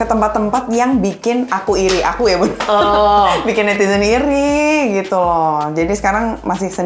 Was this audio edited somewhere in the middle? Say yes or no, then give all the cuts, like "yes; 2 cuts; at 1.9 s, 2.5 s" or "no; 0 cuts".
no; 0 cuts